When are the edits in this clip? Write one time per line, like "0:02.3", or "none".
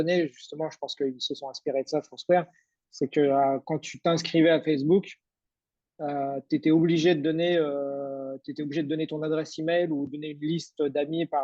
none